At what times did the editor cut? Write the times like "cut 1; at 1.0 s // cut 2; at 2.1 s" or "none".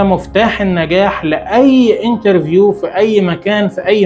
none